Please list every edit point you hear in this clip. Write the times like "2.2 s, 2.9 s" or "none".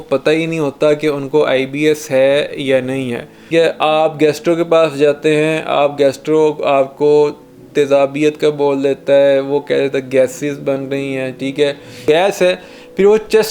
3.3 s, 12.0 s